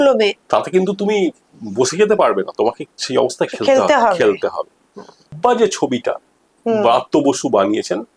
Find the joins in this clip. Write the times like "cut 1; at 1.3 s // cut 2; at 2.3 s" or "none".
cut 1; at 5.3 s